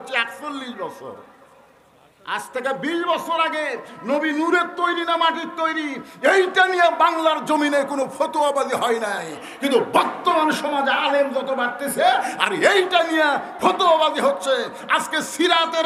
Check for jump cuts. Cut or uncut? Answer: uncut